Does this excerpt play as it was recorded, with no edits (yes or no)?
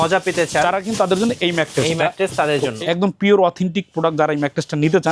no